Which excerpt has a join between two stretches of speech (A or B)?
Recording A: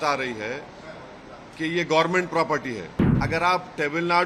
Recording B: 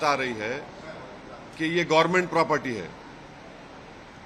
A